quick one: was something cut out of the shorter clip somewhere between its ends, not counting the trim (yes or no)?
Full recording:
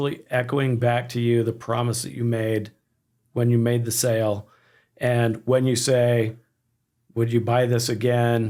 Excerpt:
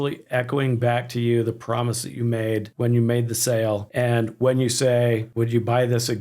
yes